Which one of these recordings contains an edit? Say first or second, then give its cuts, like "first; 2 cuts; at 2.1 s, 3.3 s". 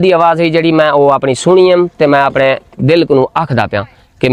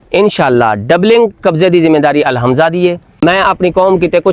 second; 1 cut; at 3.1 s